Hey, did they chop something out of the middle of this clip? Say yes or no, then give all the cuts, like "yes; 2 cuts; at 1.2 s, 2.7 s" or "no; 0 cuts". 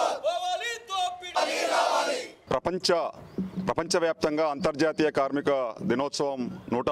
yes; 1 cut; at 2.4 s